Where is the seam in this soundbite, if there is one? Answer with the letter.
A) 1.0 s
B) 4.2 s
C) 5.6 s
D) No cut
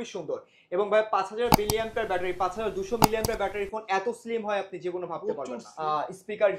C